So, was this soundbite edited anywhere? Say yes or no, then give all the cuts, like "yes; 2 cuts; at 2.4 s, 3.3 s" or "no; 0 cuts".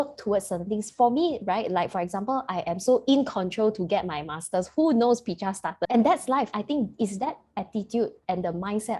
yes; 2 cuts; at 5.8 s, 6.5 s